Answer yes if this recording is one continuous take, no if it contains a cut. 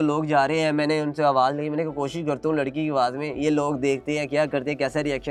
yes